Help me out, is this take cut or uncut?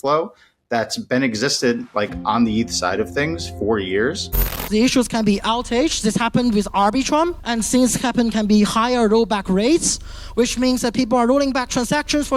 cut